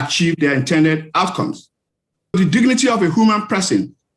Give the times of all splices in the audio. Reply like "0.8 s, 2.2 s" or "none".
2.3 s